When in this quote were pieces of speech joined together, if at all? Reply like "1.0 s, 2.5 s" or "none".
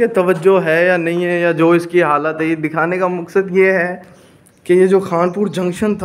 none